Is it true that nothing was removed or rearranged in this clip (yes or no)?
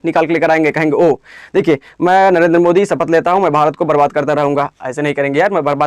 yes